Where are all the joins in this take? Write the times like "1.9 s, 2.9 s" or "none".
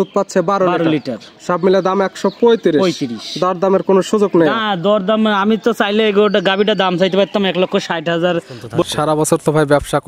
8.8 s